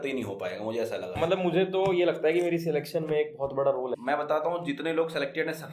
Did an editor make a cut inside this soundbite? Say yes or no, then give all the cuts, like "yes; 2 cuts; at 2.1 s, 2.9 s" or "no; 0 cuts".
yes; 2 cuts; at 1.1 s, 4.0 s